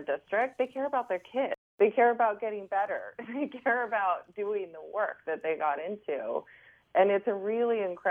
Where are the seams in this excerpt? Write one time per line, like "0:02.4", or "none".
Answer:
0:01.7